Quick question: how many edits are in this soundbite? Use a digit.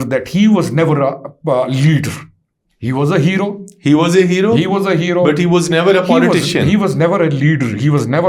0